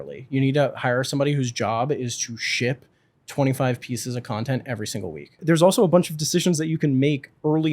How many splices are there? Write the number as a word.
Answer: one